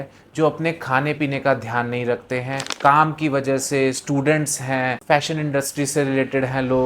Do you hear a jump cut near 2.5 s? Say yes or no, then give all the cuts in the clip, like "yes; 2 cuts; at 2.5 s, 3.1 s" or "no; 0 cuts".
no; 1 cut; at 5.0 s